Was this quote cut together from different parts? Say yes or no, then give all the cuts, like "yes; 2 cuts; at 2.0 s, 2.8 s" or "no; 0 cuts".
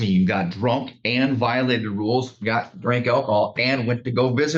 no; 0 cuts